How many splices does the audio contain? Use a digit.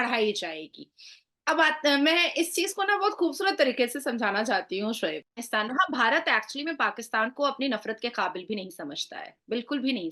1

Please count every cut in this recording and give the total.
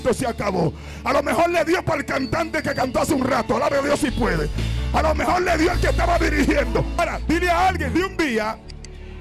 2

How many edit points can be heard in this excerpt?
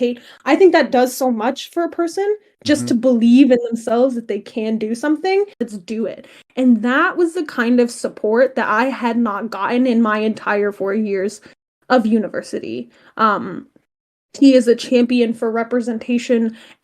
1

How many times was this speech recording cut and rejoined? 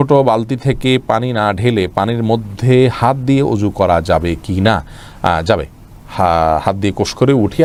0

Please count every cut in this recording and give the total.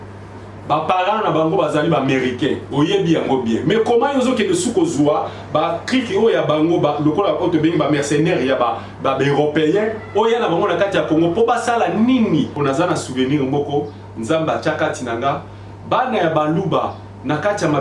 1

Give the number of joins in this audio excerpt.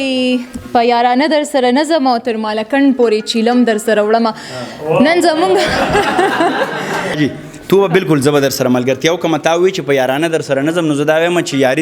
1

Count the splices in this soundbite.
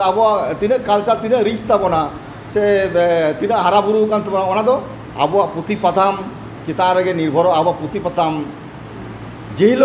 0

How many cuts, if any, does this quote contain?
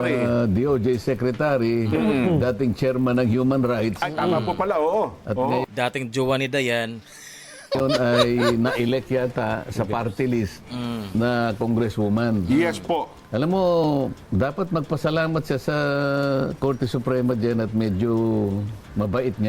1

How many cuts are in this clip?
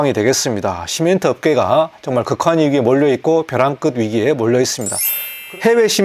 1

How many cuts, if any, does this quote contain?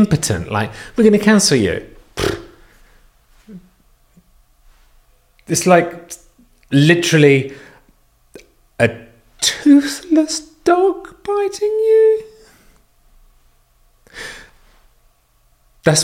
0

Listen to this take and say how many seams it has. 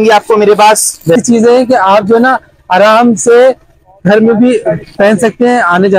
1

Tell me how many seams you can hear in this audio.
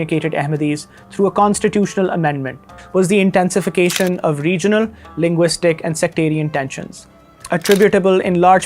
1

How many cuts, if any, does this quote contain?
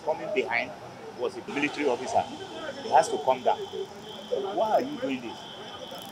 1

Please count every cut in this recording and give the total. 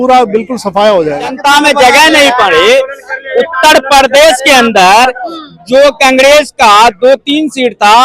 1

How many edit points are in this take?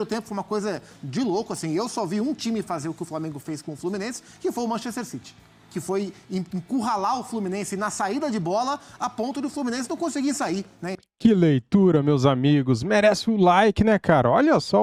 0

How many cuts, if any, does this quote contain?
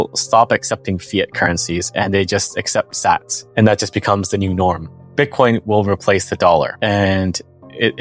2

